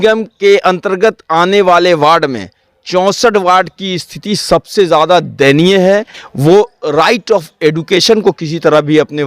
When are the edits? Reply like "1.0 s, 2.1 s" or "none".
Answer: 6.3 s

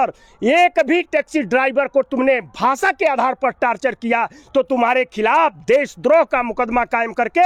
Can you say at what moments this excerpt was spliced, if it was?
none

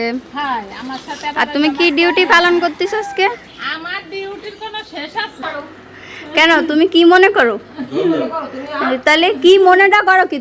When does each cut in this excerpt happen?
5.4 s

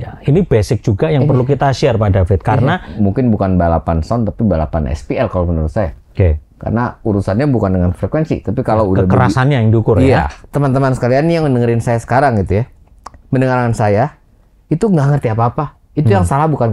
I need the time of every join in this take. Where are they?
2.9 s, 10.4 s

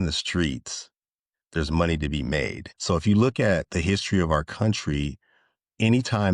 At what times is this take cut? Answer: 2.7 s

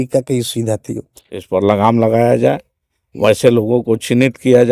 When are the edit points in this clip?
1.4 s

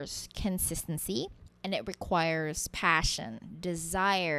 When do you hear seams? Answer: 1.5 s

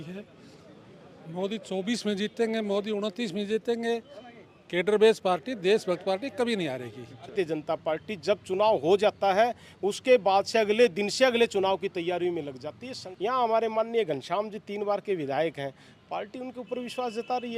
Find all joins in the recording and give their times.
7.3 s, 13.1 s

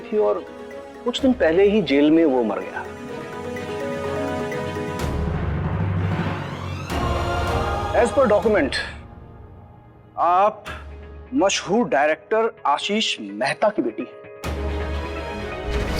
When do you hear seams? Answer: 7.4 s

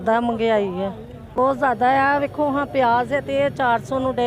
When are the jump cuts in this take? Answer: 1.2 s

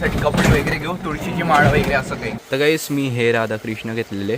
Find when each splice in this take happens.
2.3 s

